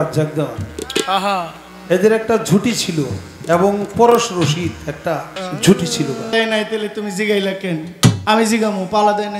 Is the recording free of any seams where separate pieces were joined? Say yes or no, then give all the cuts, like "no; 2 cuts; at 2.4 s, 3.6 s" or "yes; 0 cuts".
no; 3 cuts; at 5.4 s, 6.3 s, 8.2 s